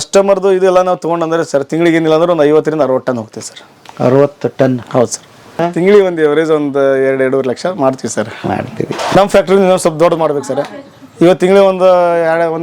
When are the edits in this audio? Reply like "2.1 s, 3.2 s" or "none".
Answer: 5.6 s, 9.2 s